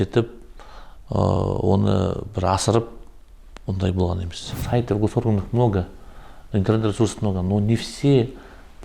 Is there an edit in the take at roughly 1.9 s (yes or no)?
no